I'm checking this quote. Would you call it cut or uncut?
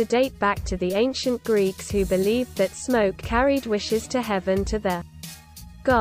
uncut